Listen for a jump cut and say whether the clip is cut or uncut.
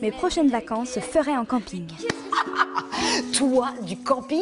cut